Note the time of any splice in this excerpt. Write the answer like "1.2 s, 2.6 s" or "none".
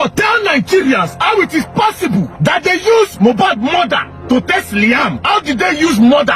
2.3 s, 4.1 s, 5.2 s